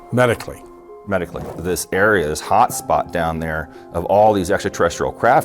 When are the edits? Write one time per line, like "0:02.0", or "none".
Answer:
0:01.4